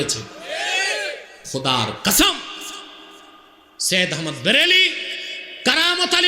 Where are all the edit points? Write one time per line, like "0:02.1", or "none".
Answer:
0:01.3